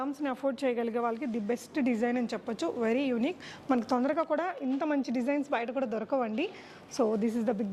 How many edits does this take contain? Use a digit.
0